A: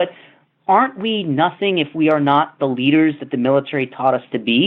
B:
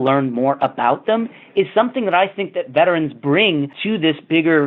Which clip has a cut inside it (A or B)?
B